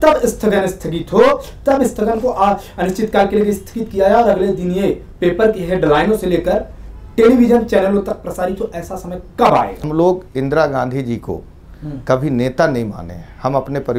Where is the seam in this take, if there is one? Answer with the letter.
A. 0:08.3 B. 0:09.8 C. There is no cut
B